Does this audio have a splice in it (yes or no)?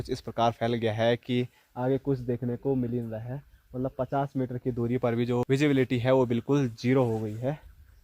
no